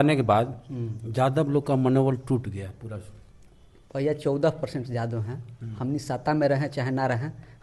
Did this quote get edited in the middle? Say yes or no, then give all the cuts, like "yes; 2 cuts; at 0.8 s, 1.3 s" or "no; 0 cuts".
no; 0 cuts